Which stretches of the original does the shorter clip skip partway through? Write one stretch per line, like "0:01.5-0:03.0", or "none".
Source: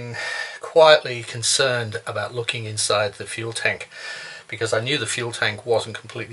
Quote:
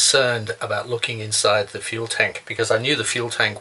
0:03.9-0:04.4

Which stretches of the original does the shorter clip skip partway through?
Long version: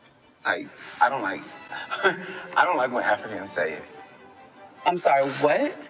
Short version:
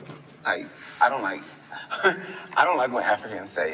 none

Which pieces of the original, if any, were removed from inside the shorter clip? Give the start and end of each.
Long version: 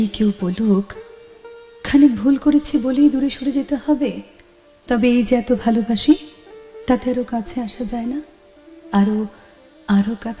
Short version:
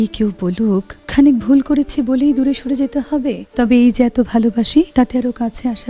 0:01.0-0:01.7
0:04.2-0:04.7
0:06.2-0:06.8

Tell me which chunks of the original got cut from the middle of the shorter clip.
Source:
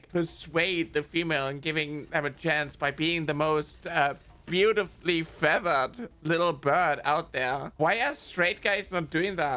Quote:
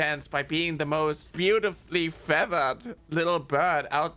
0:03.7-0:04.4

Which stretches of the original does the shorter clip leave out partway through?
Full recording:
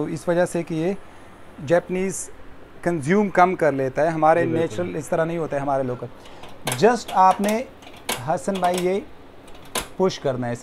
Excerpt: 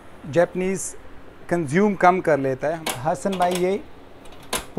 0:04.1-0:07.9

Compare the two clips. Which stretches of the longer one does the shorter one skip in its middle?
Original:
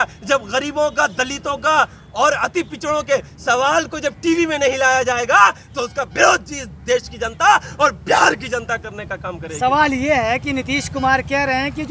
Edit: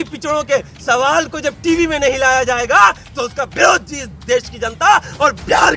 none

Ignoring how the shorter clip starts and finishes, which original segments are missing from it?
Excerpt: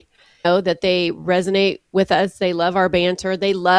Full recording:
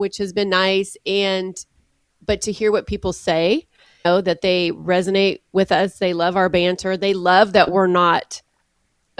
none

